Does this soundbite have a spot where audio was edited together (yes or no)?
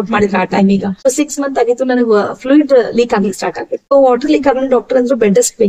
yes